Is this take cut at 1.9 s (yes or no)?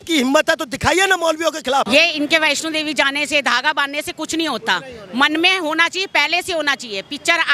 yes